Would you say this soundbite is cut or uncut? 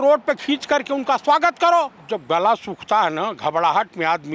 cut